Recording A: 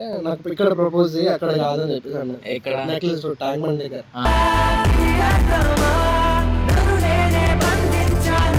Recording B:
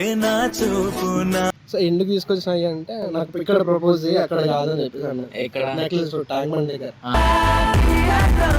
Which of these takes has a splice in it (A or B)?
B